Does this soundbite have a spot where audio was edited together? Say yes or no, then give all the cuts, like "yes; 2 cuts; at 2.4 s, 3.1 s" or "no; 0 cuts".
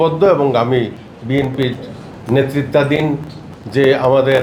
no; 0 cuts